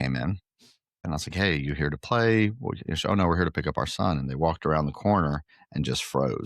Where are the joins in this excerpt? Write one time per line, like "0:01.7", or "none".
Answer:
0:01.1